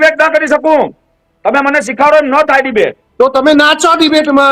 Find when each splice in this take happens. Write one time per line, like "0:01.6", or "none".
0:03.0